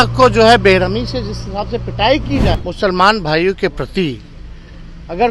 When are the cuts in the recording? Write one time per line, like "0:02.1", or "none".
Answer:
0:02.6